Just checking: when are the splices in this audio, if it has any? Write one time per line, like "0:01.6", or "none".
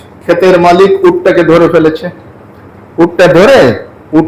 none